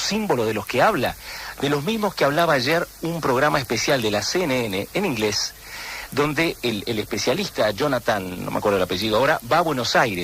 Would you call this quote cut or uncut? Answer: cut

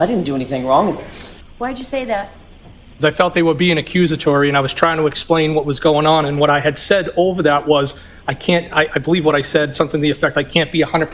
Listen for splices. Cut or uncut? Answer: uncut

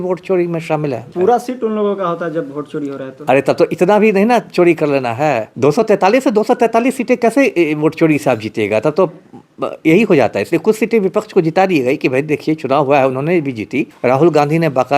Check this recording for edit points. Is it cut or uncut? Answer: cut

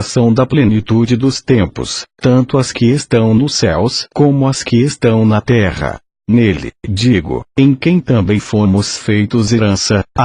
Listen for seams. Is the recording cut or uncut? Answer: uncut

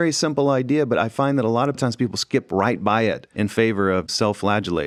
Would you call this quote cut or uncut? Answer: uncut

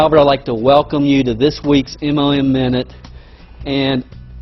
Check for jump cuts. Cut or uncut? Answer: cut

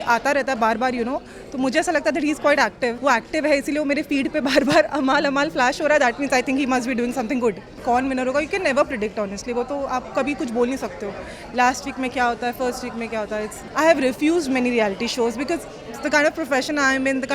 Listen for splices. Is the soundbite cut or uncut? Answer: cut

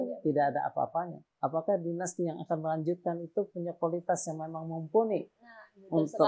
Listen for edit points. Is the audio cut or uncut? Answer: cut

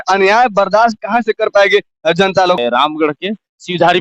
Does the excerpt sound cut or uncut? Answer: cut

